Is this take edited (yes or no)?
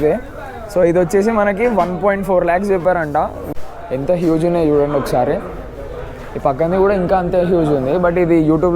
yes